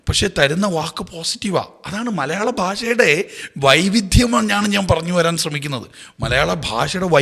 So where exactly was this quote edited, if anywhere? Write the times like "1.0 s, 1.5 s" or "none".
none